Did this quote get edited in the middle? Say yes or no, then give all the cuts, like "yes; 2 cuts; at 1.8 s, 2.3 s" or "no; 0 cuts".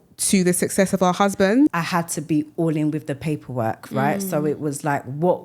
yes; 1 cut; at 1.7 s